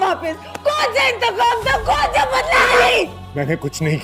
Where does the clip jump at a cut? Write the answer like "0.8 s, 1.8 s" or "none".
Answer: 2.6 s